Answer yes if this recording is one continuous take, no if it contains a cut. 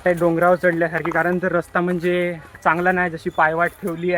yes